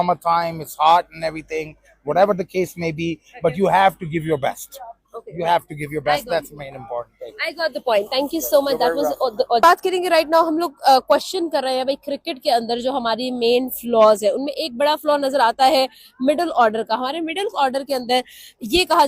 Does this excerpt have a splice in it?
no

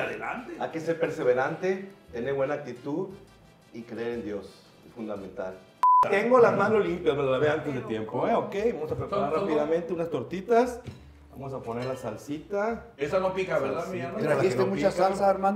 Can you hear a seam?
yes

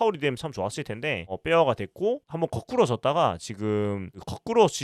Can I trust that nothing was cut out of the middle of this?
no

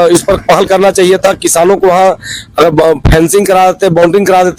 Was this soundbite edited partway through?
no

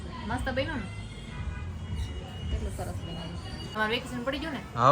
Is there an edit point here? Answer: yes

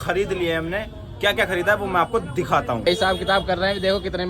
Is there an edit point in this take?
yes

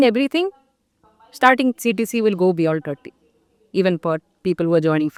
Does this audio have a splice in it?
no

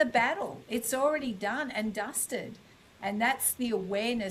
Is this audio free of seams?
yes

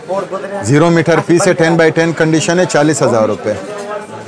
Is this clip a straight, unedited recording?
yes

